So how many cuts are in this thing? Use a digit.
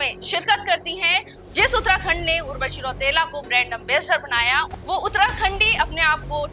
2